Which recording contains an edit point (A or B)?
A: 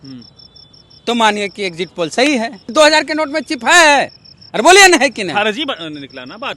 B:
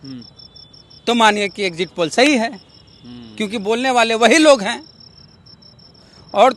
A